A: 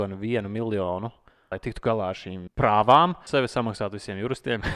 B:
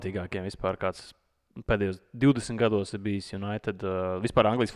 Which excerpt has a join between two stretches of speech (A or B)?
A